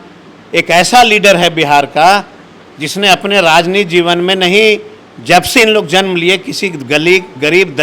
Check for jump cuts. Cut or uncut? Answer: uncut